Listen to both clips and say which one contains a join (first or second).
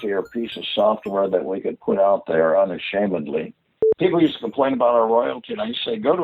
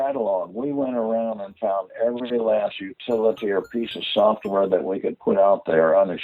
first